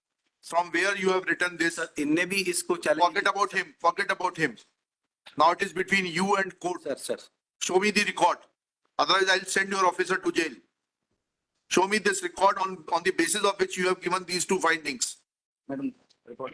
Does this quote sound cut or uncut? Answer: uncut